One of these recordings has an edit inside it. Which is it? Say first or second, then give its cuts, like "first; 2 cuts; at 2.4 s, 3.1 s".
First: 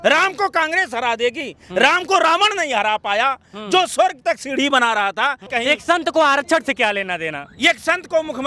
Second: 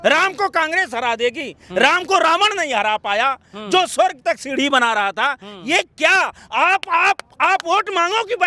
first; 1 cut; at 5.5 s